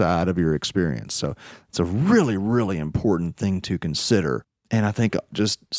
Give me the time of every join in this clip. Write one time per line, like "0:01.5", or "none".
0:04.5